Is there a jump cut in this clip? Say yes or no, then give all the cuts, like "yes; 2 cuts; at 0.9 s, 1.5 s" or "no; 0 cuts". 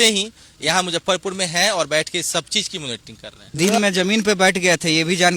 no; 0 cuts